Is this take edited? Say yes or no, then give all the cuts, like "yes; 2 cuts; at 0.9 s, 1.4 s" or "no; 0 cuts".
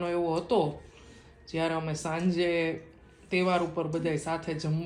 no; 0 cuts